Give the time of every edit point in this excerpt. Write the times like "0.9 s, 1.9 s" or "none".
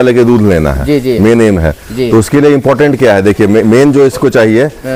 none

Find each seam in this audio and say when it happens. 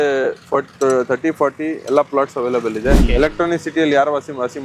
3.1 s

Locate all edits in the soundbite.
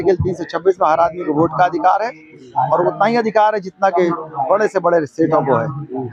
none

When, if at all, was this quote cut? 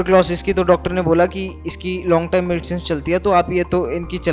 none

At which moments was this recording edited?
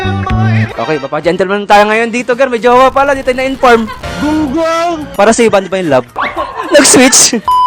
5.0 s

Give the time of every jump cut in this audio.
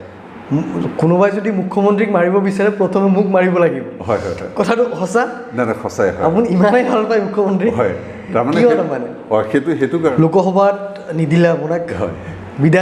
10.1 s

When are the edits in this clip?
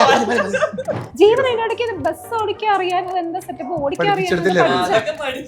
1.1 s

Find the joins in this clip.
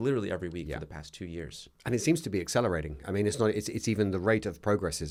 none

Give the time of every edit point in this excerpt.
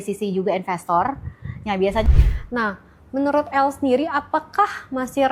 2.1 s

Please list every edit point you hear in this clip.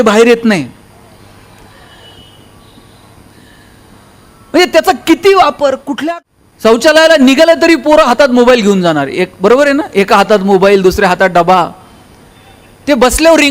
5.9 s

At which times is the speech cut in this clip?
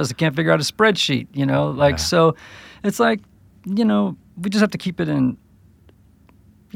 none

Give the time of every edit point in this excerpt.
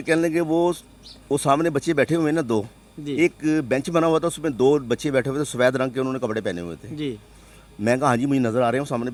none

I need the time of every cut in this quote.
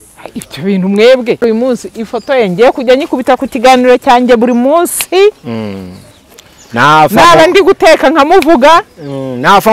1.4 s

